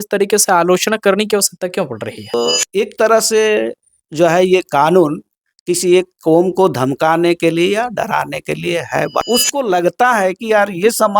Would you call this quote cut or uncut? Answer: cut